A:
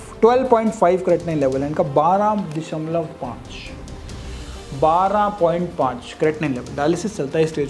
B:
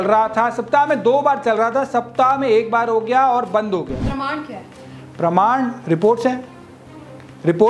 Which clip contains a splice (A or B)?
B